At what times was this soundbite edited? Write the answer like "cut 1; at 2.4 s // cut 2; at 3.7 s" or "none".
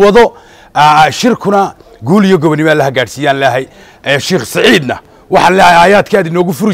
none